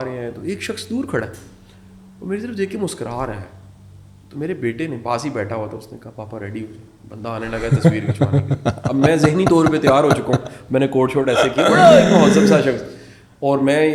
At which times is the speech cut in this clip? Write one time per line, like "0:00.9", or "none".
none

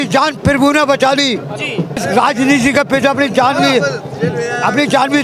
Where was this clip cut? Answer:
none

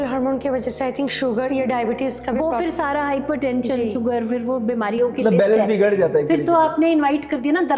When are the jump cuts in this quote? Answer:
none

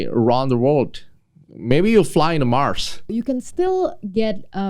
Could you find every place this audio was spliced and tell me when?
0:03.1

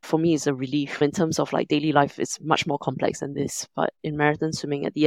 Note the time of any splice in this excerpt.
0:04.0

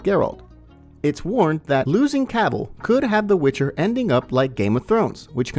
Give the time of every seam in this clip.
0:01.9

